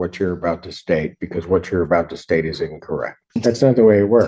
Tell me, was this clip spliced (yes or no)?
yes